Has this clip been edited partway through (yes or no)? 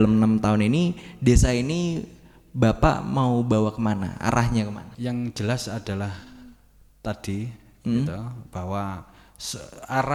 no